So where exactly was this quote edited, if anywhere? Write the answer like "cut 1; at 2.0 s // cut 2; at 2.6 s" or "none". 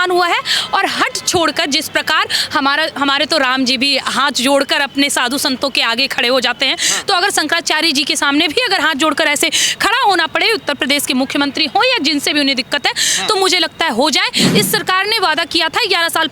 cut 1; at 14.4 s